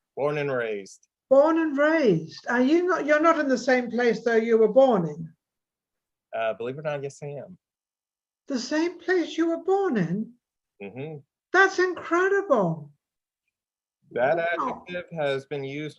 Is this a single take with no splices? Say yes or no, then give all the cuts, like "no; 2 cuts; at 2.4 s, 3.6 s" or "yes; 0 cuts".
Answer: yes; 0 cuts